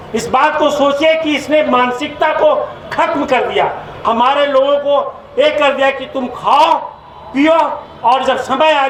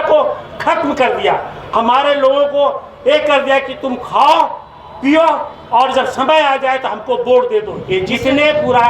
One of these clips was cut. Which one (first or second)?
second